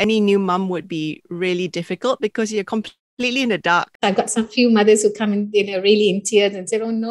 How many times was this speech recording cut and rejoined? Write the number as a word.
one